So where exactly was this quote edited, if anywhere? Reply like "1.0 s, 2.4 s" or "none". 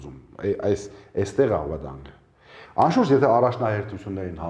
none